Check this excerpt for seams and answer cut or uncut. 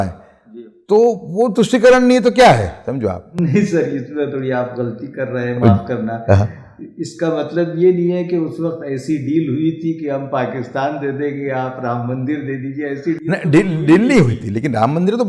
uncut